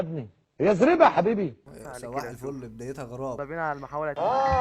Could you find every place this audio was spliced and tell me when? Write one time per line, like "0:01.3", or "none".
0:01.7
0:03.4